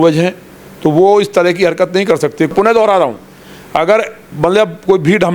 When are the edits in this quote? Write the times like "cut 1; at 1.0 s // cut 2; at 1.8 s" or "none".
cut 1; at 2.5 s